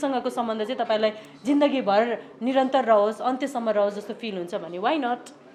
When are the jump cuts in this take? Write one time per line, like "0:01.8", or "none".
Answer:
none